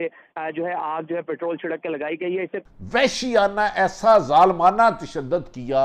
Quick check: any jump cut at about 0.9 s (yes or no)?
no